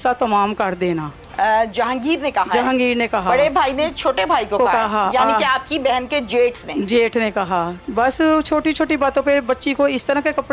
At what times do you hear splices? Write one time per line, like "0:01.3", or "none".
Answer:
0:07.7